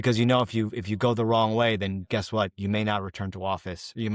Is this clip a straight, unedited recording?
yes; 0 cuts

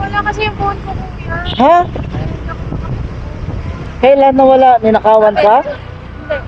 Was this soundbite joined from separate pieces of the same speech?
no; 0 cuts

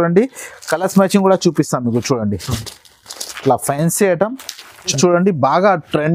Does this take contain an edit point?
yes; 1 cut; at 5.0 s

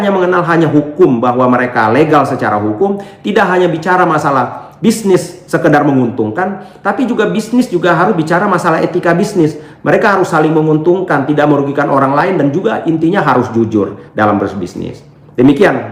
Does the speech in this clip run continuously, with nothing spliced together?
yes; 0 cuts

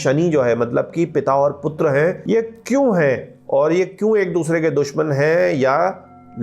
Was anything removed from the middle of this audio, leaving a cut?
yes; 1 cut; at 2.2 s

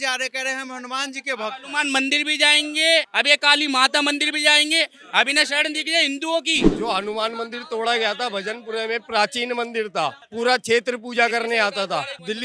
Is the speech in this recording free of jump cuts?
yes; 0 cuts

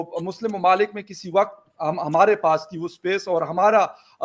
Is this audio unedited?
yes; 0 cuts

